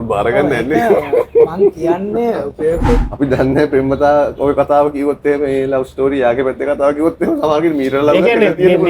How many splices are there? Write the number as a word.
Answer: one